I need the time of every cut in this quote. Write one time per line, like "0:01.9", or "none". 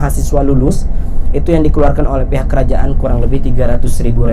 none